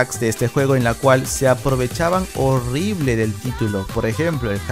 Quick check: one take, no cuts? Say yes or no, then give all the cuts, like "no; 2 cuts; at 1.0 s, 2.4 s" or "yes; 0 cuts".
yes; 0 cuts